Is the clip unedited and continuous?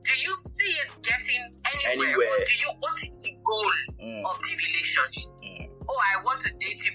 yes; 0 cuts

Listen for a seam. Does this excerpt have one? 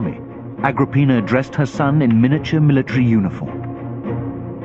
yes; 1 cut; at 2.0 s

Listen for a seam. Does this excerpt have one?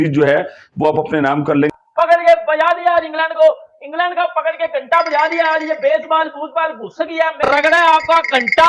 yes; 2 cuts; at 1.8 s, 7.4 s

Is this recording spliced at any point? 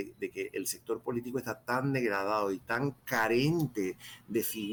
no; 0 cuts

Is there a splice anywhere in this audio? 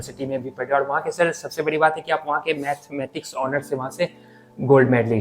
no; 0 cuts

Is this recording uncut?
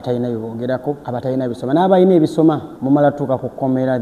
no; 2 cuts; at 1.0 s, 2.7 s

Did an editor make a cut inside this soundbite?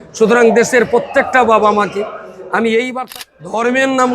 yes; 1 cut; at 3.1 s

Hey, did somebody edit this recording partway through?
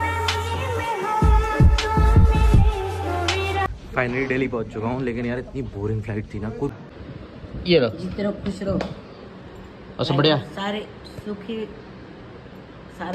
yes; 1 cut; at 6.7 s

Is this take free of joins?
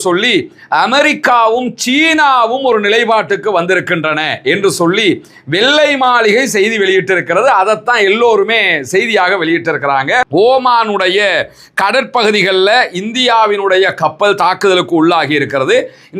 no; 1 cut; at 10.3 s

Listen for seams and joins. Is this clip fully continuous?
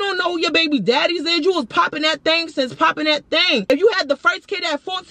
no; 1 cut; at 3.7 s

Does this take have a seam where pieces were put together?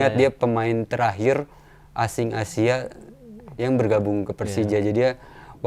no; 0 cuts

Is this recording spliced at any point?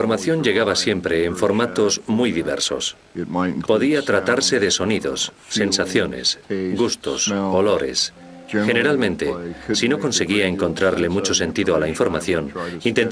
yes; 1 cut; at 5.1 s

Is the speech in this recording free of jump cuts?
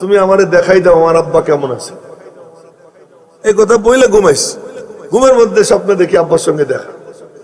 yes; 0 cuts

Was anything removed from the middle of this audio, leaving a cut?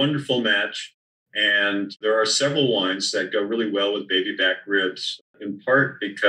yes; 1 cut; at 2.0 s

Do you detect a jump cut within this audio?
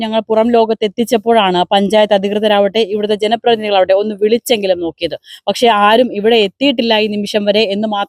no; 0 cuts

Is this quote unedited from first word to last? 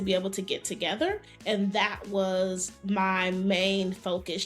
no; 1 cut; at 1.3 s

